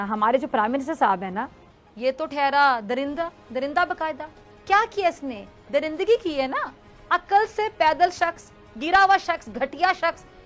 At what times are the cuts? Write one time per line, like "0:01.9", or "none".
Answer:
none